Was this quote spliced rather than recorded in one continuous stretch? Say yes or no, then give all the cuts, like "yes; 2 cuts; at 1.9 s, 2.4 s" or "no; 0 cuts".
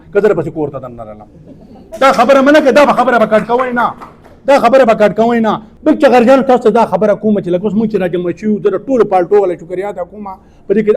yes; 1 cut; at 5.7 s